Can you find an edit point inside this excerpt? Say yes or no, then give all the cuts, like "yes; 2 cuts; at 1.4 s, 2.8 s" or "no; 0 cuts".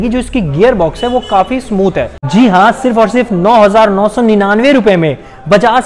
yes; 1 cut; at 2.2 s